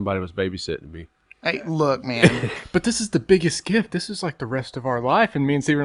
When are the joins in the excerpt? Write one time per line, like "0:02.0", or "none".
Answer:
0:02.6